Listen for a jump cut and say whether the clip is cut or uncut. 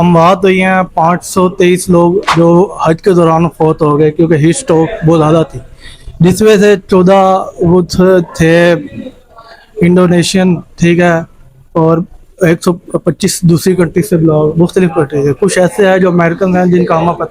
uncut